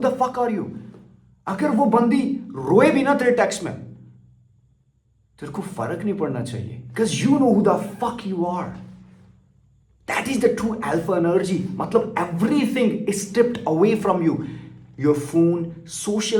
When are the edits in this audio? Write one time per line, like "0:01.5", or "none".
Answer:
none